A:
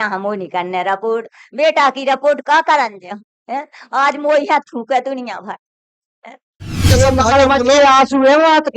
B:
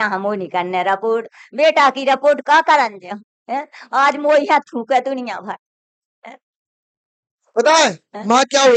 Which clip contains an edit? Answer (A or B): A